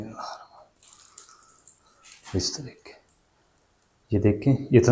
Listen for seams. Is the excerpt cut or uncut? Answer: uncut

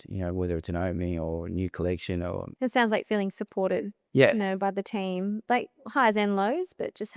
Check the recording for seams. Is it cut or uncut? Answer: cut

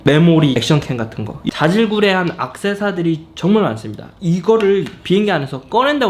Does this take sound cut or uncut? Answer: cut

